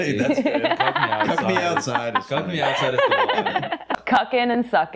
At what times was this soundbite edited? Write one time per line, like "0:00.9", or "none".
0:04.0